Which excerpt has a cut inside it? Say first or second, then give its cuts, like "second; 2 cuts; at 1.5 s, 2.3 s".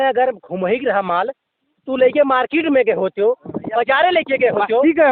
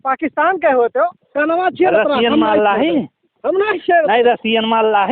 second; 1 cut; at 1.2 s